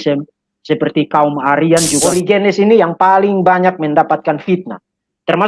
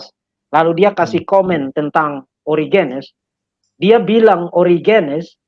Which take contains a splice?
first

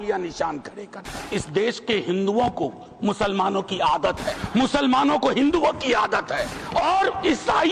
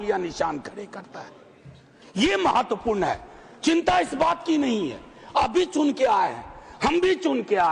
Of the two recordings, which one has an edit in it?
first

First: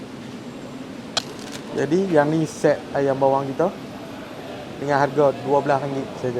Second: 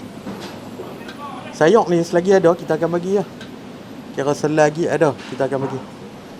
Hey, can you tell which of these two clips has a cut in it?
first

